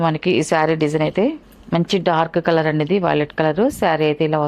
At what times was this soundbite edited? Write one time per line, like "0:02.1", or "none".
0:01.5

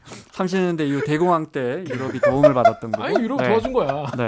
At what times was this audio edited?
none

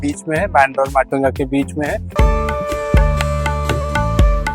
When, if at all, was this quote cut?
0:02.1

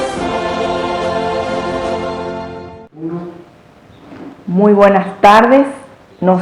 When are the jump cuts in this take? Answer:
0:02.8

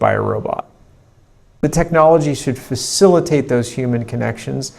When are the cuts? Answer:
0:01.6

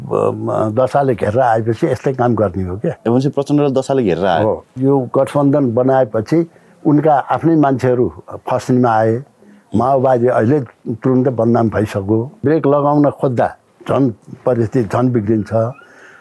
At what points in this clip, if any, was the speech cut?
0:03.0
0:04.7
0:12.4

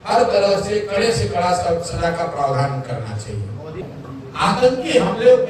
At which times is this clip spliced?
0:03.8

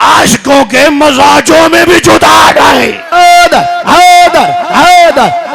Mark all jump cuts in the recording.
0:03.0

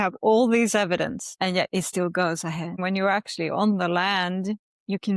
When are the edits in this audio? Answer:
0:01.2
0:02.8

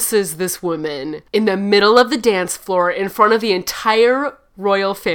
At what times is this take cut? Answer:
0:01.1

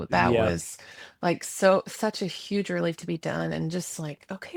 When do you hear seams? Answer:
none

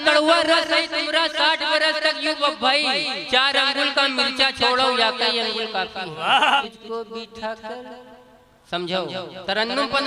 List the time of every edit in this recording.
0:06.6

